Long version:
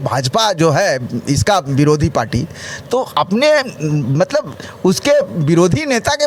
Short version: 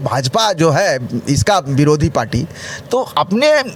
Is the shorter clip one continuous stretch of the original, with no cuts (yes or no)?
yes